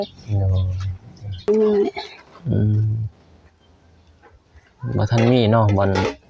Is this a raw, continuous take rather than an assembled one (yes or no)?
no